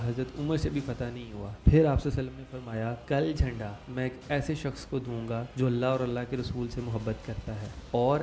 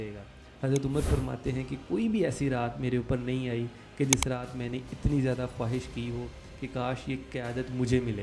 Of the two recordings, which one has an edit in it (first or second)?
first